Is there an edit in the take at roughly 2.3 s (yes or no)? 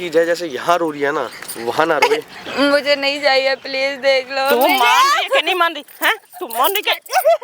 yes